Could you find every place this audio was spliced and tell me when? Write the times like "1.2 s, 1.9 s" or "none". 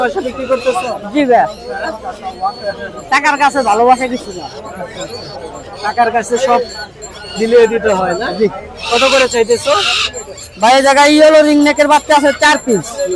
none